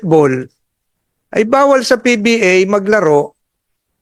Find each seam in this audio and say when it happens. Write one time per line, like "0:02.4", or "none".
none